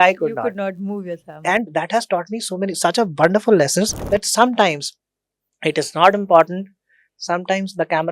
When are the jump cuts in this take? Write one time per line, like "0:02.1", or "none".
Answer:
0:04.0